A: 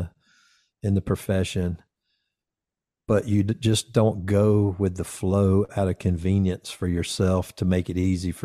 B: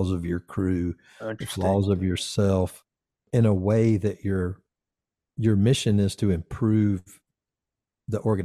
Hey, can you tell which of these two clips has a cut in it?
B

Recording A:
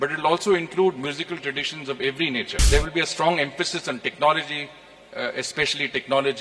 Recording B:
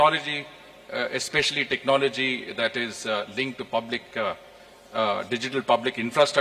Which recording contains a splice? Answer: A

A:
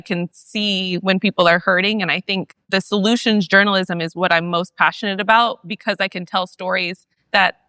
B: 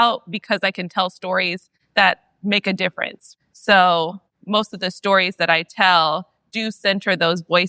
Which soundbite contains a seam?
A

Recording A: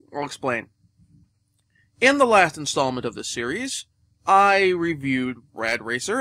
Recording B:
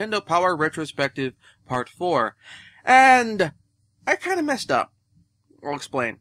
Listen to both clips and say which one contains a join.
A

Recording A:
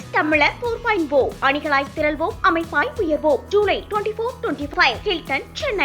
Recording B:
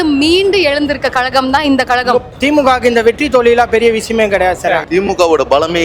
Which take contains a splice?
B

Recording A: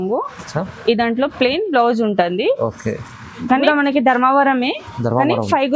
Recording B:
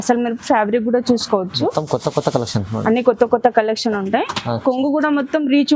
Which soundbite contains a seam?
A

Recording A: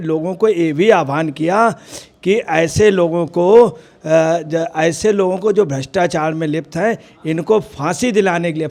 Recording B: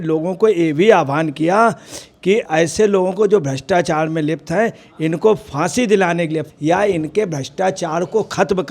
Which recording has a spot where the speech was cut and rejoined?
B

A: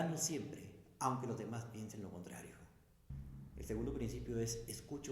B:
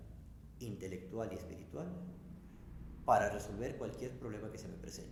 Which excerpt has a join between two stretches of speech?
A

